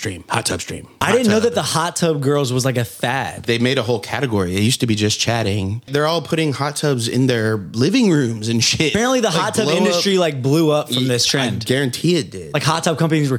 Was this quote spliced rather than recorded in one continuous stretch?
yes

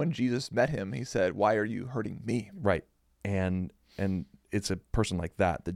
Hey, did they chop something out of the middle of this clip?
yes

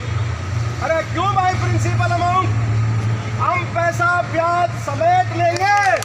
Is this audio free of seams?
yes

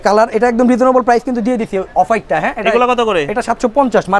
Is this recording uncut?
yes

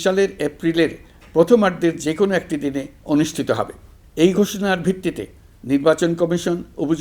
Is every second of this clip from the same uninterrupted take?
yes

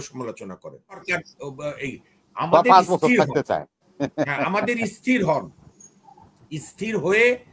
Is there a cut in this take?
yes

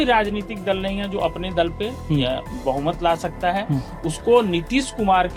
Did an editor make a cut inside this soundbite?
no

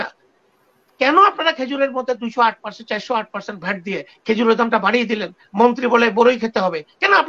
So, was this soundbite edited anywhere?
no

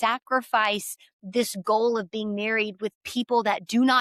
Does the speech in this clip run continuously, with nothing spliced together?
yes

